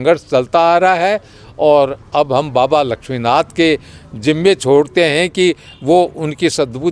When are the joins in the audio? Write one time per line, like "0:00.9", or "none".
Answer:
none